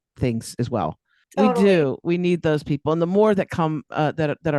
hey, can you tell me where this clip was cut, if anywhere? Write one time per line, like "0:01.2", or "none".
0:01.2